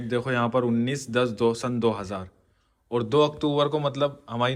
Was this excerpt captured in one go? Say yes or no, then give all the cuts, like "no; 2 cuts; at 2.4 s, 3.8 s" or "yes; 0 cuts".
yes; 0 cuts